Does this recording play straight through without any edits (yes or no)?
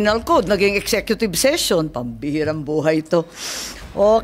yes